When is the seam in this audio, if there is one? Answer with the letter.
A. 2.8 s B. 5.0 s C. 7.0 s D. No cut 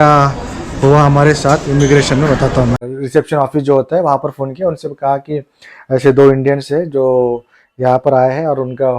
A